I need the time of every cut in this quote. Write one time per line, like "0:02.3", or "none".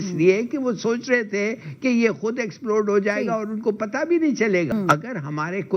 0:04.7